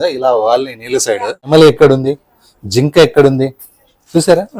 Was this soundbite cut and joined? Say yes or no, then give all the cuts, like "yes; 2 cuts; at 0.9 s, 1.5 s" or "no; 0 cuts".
yes; 1 cut; at 1.5 s